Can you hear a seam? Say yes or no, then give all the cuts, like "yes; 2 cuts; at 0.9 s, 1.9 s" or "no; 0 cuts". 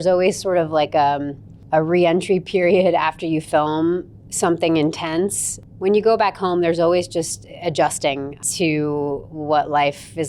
yes; 2 cuts; at 5.6 s, 8.4 s